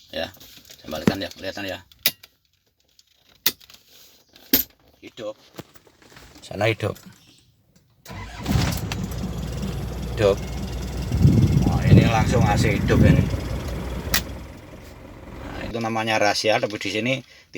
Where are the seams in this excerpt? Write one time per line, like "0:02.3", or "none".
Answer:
0:15.7